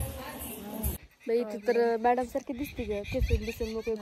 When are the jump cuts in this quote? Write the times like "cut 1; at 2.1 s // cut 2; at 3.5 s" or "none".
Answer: cut 1; at 1.0 s